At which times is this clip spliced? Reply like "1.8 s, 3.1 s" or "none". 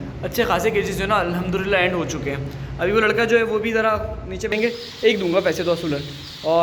4.5 s